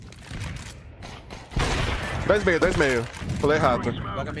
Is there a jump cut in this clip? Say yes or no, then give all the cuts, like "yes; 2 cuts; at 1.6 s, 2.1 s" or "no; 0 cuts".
no; 0 cuts